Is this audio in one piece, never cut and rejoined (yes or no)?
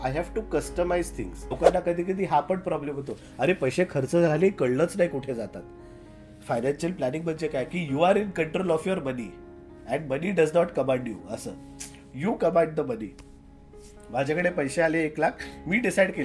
no